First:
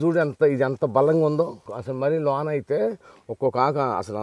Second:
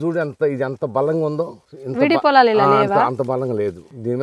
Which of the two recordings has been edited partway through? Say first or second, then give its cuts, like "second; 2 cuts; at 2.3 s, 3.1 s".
first; 1 cut; at 1.8 s